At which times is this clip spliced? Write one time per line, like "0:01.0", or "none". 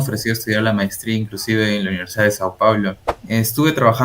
0:03.1